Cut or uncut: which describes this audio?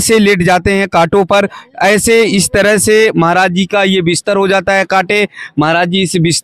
uncut